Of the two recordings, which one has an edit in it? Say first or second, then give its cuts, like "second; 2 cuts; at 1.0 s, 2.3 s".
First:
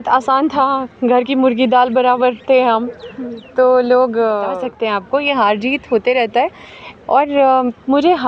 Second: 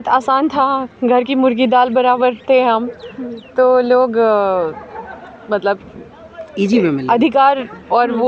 first; 1 cut; at 4.7 s